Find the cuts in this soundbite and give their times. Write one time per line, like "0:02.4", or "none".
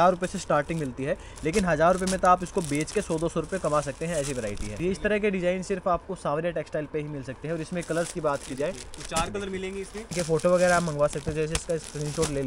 0:04.7
0:10.1